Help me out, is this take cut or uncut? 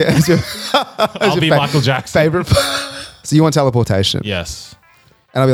cut